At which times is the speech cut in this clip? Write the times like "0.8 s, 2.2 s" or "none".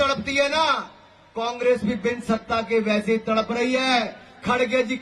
none